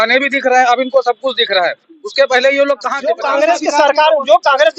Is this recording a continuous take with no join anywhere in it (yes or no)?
no